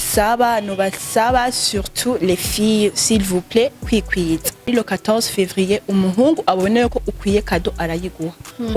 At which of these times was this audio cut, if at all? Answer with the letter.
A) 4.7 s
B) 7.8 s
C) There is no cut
A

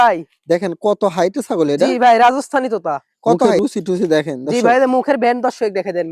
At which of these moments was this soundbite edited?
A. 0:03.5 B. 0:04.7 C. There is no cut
A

